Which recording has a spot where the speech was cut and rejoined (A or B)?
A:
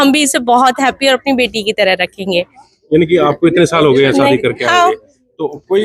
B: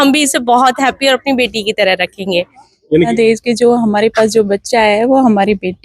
B